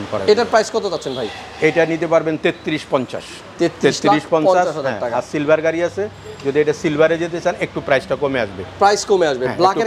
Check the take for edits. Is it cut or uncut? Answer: uncut